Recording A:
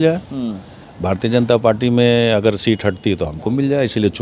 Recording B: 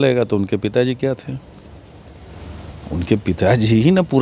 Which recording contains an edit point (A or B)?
B